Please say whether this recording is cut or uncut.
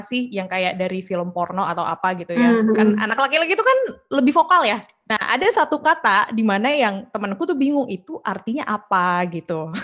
cut